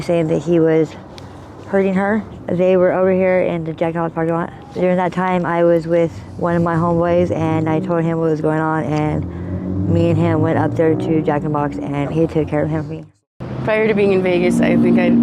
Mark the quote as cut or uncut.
cut